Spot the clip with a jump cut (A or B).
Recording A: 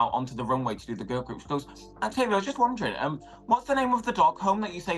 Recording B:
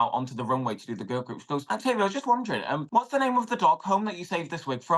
B